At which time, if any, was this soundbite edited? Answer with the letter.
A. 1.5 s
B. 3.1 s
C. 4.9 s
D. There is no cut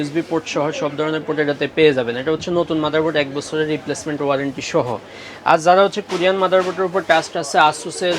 D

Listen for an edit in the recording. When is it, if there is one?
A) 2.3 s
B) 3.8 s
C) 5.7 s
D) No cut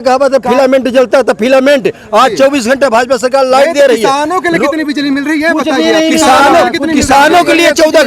D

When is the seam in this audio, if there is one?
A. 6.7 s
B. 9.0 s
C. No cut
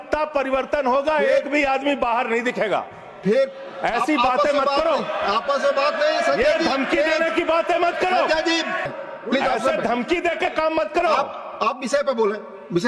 B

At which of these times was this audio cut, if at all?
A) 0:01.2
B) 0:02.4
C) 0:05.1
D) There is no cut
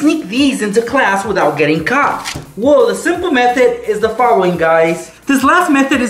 C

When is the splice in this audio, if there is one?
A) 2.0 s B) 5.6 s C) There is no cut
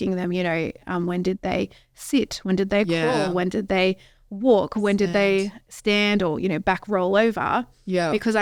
C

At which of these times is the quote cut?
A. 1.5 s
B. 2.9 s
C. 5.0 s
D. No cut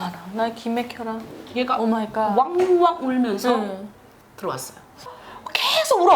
C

